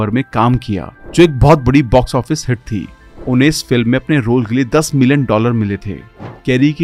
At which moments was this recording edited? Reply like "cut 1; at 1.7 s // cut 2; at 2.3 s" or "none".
none